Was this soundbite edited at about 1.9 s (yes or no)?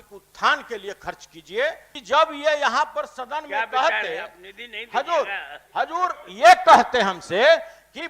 yes